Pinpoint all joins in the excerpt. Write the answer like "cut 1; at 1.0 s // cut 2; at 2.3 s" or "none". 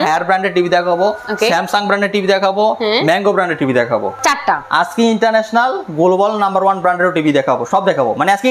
cut 1; at 4.1 s